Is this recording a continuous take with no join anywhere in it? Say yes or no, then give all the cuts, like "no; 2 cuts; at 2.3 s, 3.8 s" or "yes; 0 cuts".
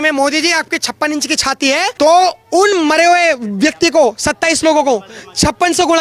no; 1 cut; at 1.9 s